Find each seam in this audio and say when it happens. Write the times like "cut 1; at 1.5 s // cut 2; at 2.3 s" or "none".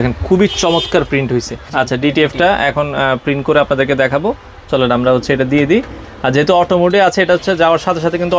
cut 1; at 1.6 s